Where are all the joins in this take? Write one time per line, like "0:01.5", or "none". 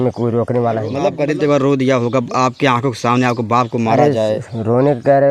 0:01.0